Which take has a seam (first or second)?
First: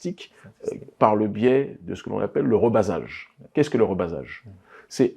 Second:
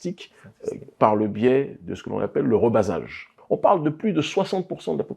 second